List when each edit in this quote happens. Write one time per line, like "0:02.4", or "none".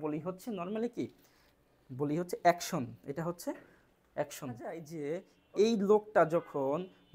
0:04.9